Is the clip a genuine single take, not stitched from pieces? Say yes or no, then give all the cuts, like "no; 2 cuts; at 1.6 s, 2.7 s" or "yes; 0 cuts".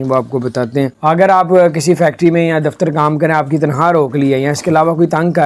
no; 1 cut; at 0.9 s